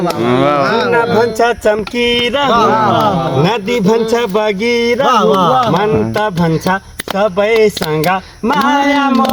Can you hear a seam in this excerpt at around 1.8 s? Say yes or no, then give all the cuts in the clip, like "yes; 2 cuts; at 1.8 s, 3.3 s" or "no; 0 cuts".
no; 0 cuts